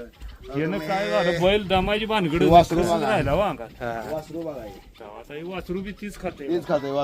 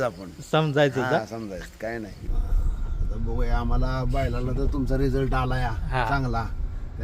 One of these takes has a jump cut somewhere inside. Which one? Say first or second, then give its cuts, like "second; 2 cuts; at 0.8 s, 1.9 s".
second; 1 cut; at 2.2 s